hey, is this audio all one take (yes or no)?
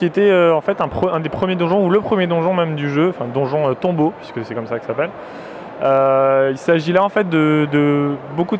no